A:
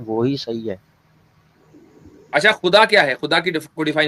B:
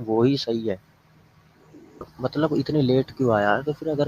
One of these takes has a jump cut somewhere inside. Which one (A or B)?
B